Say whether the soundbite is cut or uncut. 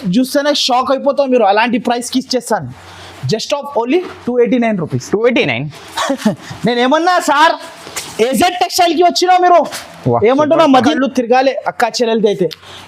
cut